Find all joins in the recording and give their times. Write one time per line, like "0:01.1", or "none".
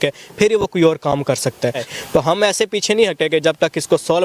0:01.9

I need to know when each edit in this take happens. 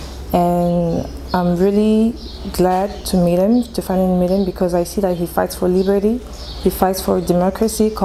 none

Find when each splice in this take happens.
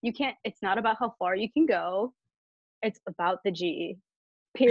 none

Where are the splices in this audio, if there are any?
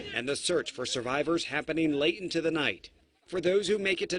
0:02.8

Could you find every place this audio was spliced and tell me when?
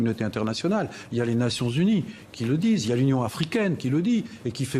0:01.0

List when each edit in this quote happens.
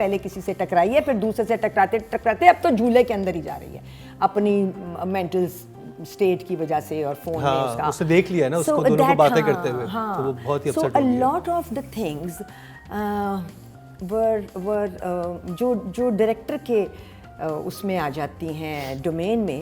none

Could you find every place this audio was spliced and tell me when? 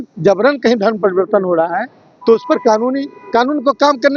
none

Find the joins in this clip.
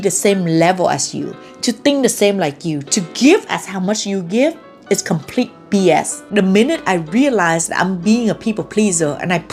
0:06.2

